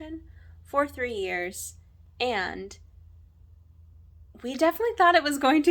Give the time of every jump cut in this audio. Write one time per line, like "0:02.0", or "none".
none

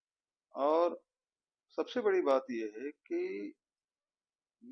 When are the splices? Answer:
none

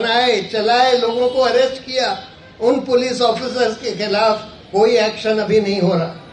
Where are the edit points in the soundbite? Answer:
none

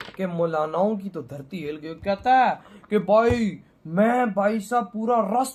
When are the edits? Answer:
none

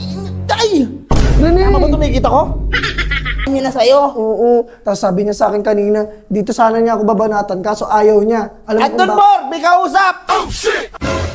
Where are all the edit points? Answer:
0:03.5

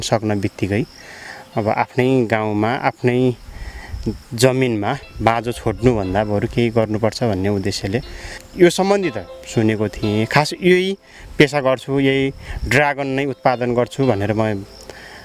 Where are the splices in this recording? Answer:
0:08.4

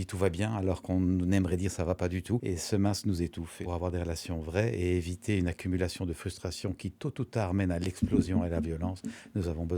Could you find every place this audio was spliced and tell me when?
0:02.4
0:03.6

